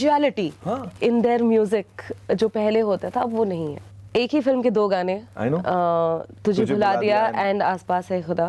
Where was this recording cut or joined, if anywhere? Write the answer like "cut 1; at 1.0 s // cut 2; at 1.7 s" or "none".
cut 1; at 3.8 s